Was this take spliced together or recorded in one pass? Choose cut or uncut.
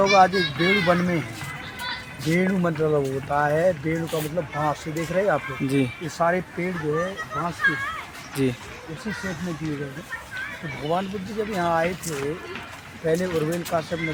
uncut